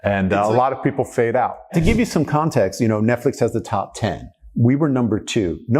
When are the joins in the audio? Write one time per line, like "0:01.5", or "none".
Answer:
0:01.8